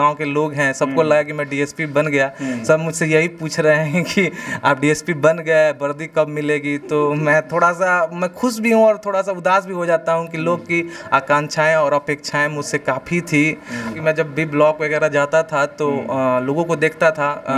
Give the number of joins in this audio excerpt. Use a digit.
1